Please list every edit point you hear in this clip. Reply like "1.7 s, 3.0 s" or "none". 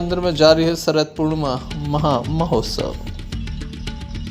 3.4 s